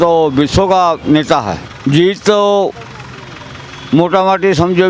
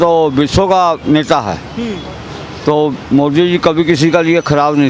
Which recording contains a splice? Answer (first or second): first